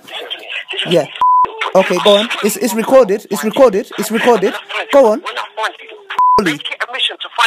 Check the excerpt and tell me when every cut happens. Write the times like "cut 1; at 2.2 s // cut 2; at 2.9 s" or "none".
cut 1; at 6.4 s